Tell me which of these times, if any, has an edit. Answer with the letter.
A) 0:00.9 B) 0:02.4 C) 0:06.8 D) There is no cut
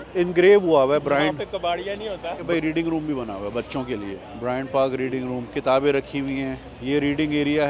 B